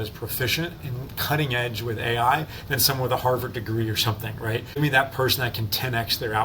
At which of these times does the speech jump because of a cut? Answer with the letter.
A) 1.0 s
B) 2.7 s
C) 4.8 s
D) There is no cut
C